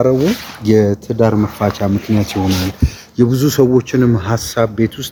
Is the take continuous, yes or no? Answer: yes